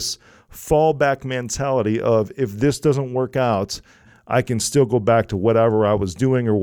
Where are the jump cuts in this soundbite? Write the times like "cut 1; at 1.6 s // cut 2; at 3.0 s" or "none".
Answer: cut 1; at 4.1 s